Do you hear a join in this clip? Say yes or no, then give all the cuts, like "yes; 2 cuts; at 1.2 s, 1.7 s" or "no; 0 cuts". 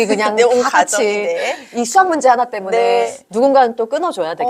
yes; 1 cut; at 3.1 s